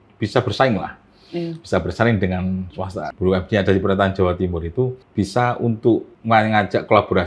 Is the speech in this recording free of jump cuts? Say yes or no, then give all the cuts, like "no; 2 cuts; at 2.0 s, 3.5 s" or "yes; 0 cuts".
no; 3 cuts; at 3.1 s, 5.0 s, 6.1 s